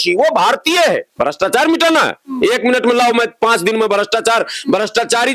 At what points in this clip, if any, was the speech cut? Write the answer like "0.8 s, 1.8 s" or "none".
1.1 s